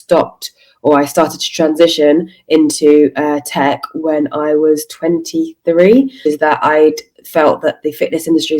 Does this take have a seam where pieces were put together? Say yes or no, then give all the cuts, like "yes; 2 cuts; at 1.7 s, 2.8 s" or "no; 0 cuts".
yes; 1 cut; at 6.2 s